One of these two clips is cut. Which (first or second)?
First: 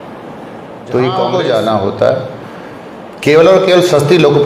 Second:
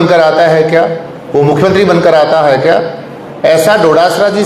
first